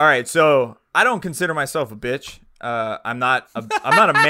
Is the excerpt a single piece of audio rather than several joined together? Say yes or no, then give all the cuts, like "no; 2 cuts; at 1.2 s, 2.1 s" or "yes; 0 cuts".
yes; 0 cuts